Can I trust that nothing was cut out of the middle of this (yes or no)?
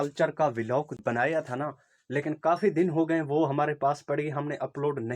no